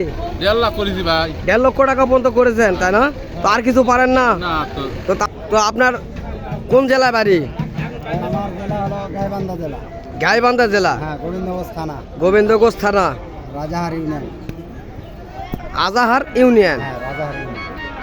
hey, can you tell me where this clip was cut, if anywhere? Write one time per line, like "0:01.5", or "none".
0:05.2

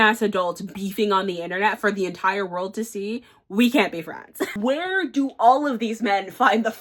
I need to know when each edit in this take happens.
0:04.5

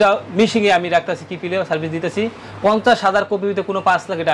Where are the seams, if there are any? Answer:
none

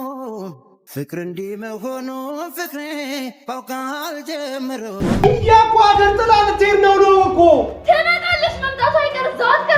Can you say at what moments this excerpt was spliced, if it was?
0:05.2

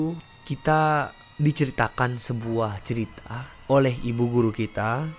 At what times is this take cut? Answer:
none

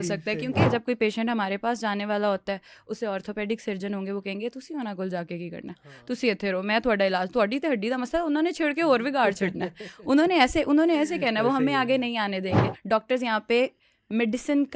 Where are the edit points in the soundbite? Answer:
0:00.7
0:12.7

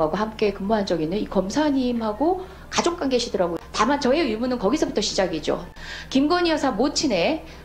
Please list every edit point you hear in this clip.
0:03.6
0:05.7

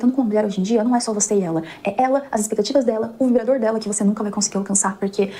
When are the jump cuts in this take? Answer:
none

